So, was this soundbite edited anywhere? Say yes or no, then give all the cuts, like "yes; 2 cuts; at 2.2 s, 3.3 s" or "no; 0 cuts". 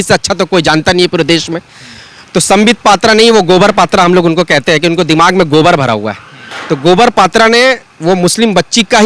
no; 0 cuts